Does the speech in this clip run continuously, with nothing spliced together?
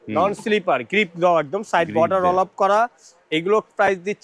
yes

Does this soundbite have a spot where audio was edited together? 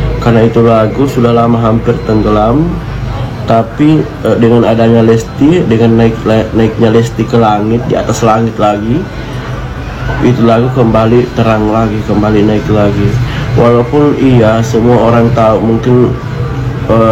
no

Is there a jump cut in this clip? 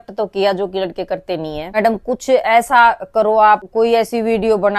yes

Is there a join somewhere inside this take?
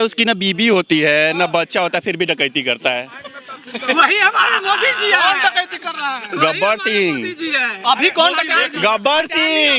no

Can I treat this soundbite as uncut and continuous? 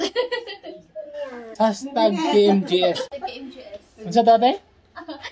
no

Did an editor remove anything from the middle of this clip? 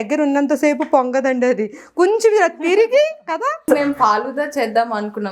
yes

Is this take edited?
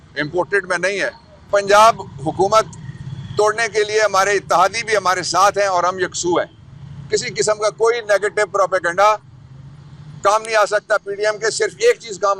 yes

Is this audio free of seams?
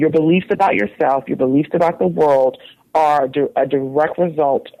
yes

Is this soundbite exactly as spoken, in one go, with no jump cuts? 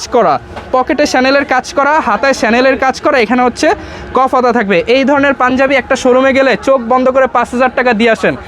yes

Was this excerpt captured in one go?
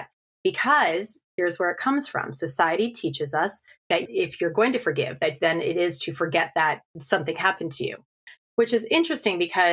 no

